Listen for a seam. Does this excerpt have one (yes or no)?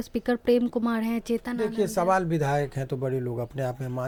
no